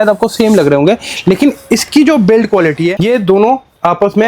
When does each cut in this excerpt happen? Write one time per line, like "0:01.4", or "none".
0:03.0